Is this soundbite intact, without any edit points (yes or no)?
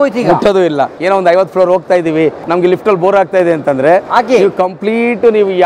no